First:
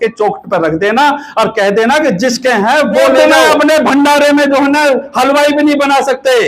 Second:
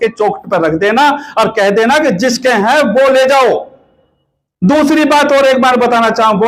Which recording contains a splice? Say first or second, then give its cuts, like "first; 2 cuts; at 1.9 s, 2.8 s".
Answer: first; 1 cut; at 3.2 s